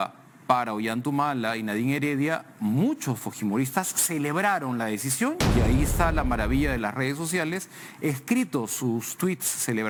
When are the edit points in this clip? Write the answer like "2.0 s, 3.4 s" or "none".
none